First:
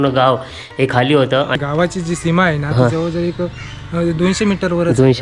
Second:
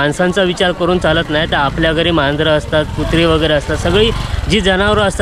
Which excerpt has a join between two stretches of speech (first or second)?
first